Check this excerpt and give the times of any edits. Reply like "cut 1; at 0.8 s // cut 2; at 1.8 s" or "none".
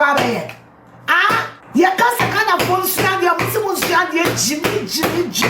cut 1; at 1.6 s